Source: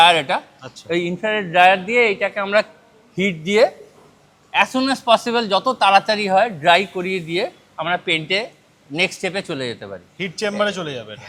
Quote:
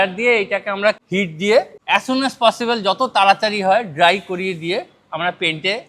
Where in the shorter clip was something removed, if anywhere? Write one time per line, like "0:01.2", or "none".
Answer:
0:01.0
0:01.8